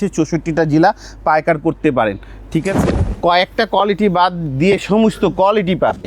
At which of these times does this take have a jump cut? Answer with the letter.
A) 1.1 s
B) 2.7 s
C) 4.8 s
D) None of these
B